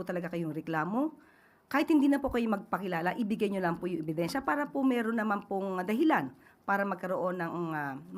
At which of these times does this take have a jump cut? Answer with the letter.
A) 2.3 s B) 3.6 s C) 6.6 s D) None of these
D